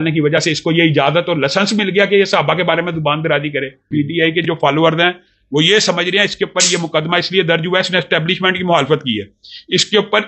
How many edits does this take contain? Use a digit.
1